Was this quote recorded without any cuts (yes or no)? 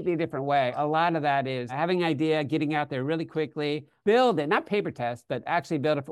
no